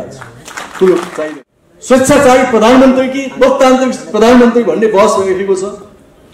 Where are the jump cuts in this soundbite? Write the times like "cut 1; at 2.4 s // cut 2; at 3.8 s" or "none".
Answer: cut 1; at 1.2 s